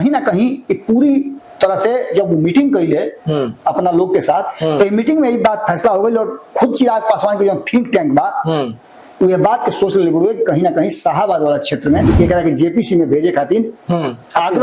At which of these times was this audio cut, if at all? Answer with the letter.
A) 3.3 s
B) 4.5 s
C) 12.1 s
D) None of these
C